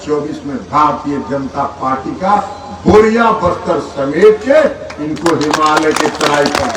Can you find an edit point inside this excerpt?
no; 0 cuts

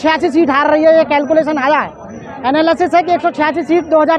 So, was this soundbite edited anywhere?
no; 0 cuts

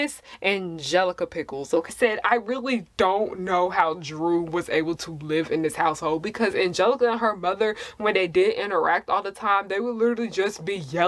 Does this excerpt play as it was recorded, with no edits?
no; 1 cut; at 1.9 s

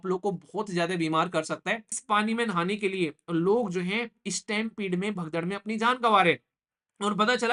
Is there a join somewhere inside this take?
yes; 1 cut; at 1.9 s

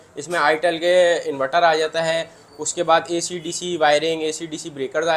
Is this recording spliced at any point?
no; 0 cuts

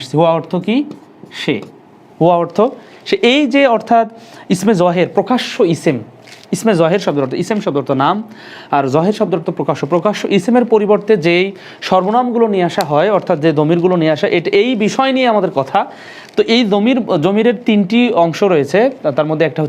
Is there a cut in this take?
no; 0 cuts

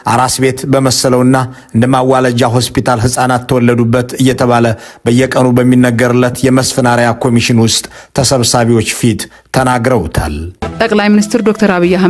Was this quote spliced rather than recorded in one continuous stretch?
yes; 1 cut; at 10.2 s

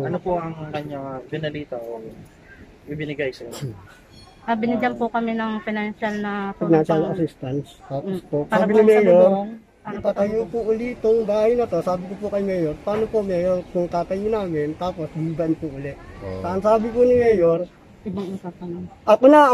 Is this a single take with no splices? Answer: yes; 0 cuts

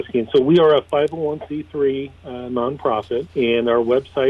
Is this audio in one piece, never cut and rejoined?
no; 1 cut; at 3.3 s

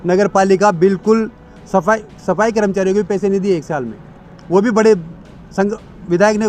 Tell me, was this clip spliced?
no; 0 cuts

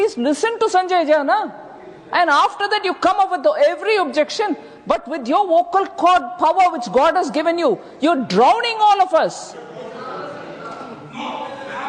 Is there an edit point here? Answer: no; 0 cuts

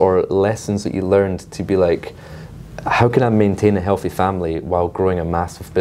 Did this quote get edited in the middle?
no; 0 cuts

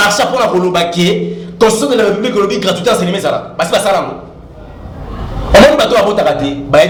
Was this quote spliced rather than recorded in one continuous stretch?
no; 0 cuts

